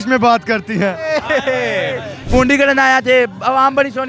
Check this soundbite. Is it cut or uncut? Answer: cut